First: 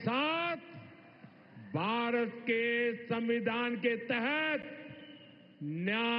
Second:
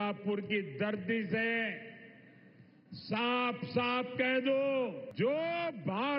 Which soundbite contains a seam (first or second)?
second